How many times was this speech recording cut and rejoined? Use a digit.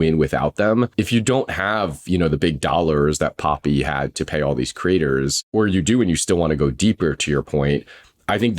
2